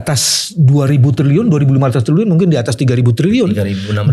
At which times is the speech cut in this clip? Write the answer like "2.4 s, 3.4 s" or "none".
none